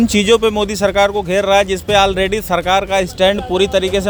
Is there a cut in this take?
no; 0 cuts

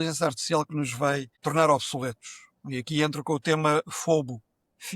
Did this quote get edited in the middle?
yes; 1 cut; at 1.3 s

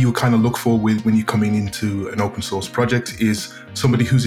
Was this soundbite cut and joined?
no; 0 cuts

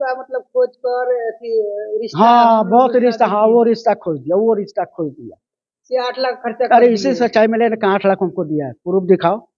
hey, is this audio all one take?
yes; 0 cuts

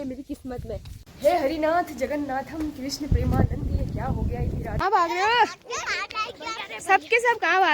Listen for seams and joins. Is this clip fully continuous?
no; 2 cuts; at 1.0 s, 4.8 s

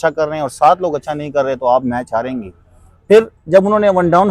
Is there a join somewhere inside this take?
no; 0 cuts

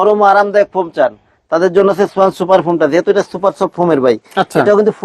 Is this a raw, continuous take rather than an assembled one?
yes; 0 cuts

